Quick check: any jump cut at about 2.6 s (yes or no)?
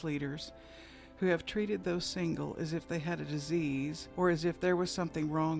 no